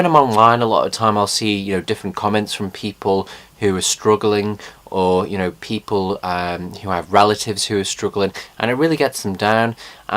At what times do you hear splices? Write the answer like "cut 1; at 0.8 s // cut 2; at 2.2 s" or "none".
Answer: cut 1; at 7.9 s